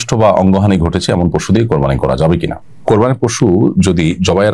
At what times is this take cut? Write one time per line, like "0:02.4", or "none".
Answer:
0:02.5